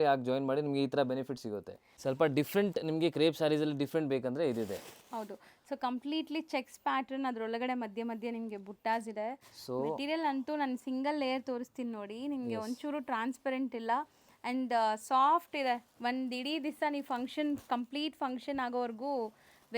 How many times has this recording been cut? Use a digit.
2